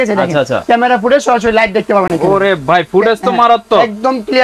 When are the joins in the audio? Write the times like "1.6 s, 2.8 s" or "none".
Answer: none